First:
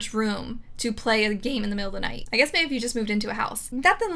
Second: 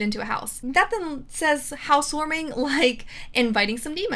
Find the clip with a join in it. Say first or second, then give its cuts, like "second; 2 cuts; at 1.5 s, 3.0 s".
first; 1 cut; at 2.2 s